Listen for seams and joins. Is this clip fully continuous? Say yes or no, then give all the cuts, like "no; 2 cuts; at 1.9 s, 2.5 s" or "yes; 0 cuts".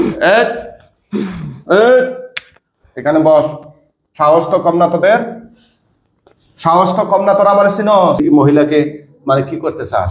no; 1 cut; at 8.2 s